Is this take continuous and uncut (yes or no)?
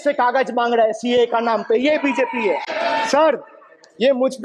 no